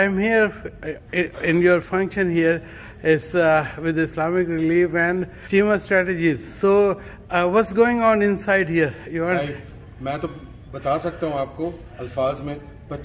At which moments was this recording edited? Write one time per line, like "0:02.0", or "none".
0:05.4

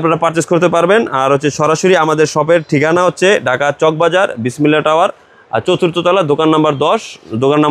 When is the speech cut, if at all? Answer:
none

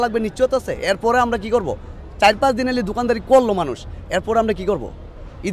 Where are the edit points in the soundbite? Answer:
none

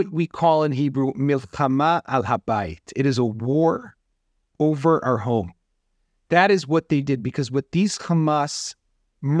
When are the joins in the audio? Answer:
none

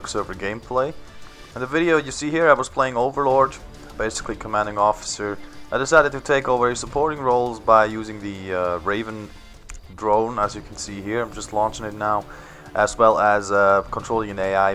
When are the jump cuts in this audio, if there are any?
0:02.7

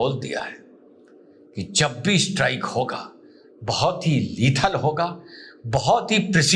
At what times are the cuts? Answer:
none

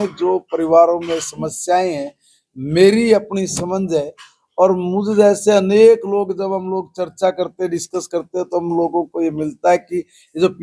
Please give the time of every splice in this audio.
none

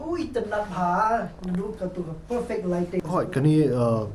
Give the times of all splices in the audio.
0:03.0

